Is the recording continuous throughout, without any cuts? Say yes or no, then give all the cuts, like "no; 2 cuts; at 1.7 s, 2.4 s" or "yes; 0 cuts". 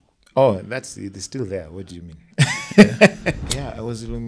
no; 1 cut; at 3.3 s